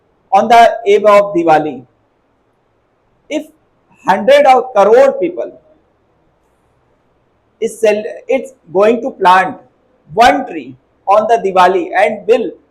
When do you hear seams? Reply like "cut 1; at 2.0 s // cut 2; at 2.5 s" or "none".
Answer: none